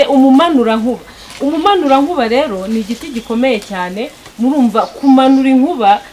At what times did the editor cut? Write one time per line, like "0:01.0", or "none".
none